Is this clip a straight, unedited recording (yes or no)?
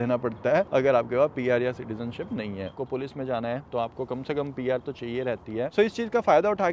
no